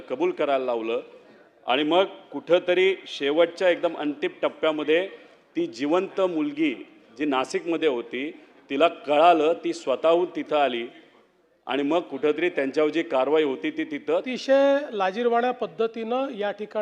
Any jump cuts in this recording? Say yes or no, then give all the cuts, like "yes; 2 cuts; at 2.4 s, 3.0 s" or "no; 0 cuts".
yes; 1 cut; at 14.3 s